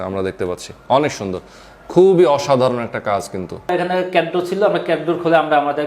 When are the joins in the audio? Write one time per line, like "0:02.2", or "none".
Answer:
0:03.7

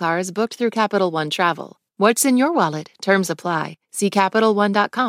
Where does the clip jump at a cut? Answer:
0:01.7

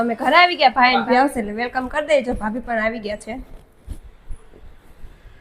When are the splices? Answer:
0:01.1
0:04.0

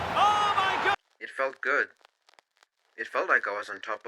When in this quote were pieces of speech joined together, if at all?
0:01.0

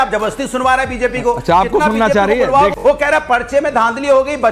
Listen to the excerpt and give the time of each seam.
0:01.4
0:02.8

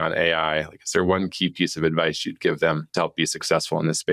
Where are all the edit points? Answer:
0:02.8

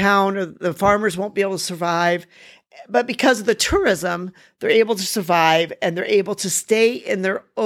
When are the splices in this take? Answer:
none

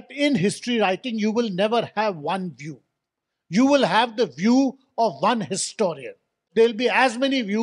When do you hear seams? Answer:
0:06.5

